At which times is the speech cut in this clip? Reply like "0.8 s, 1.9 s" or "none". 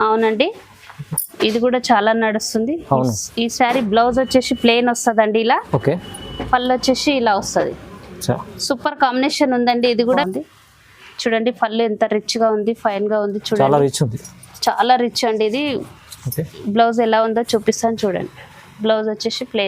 10.2 s